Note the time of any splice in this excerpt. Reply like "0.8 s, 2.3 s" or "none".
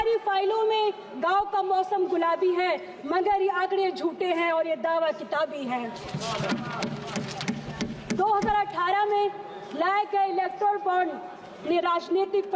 none